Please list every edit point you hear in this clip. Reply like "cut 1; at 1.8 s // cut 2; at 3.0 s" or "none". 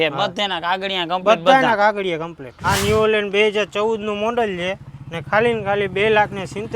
cut 1; at 2.5 s

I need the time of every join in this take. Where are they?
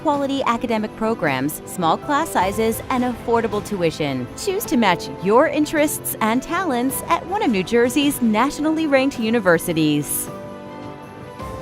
cut 1; at 10.1 s

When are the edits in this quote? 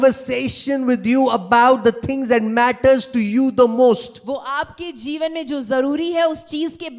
none

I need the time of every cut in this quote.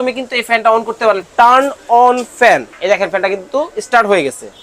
cut 1; at 1.2 s // cut 2; at 2.7 s

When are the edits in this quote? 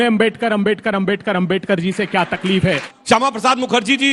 cut 1; at 2.9 s

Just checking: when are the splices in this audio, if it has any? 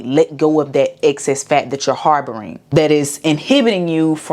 cut 1; at 2.5 s

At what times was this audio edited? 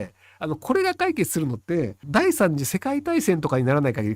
cut 1; at 2.0 s

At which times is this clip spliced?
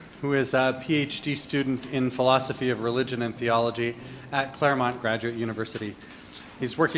none

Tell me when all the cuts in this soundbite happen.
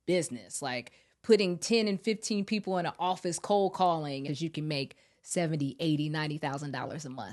cut 1; at 4.2 s

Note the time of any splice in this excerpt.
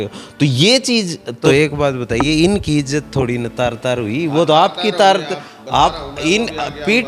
cut 1; at 1.4 s

